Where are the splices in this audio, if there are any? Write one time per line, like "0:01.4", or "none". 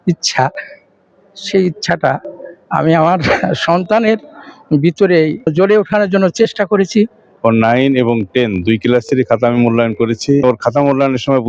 0:05.5
0:07.2
0:10.4

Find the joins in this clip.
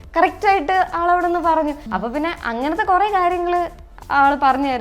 0:01.8

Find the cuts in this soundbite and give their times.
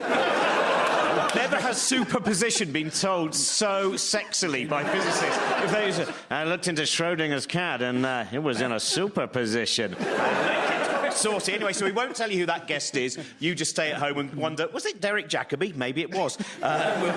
0:05.1

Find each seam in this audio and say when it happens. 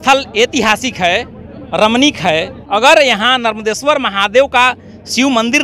0:02.5

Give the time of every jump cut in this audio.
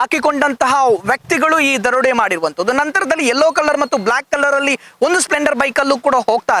none

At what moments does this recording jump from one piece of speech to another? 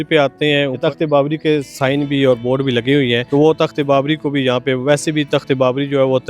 0:00.8
0:03.2

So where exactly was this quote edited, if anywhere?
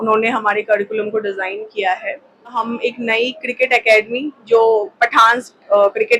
0:02.6

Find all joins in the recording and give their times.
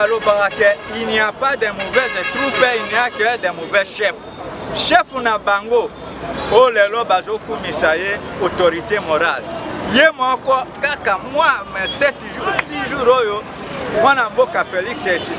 none

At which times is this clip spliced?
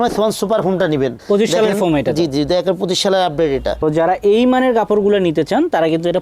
0:01.2
0:03.8

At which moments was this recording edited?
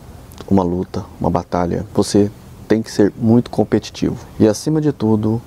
0:01.9
0:04.2

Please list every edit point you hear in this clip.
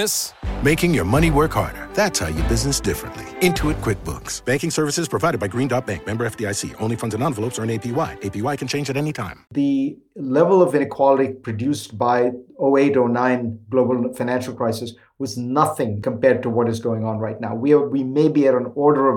0:09.4
0:10.8
0:16.0

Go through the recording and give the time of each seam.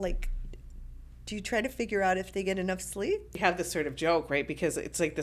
0:03.3

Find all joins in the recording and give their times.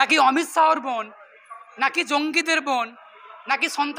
none

